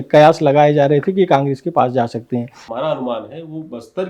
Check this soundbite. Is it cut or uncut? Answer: cut